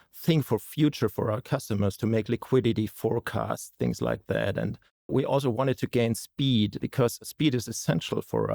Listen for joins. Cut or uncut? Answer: cut